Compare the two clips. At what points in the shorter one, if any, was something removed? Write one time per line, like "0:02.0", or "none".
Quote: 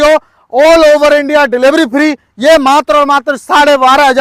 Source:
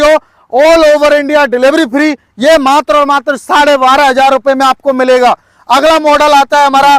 none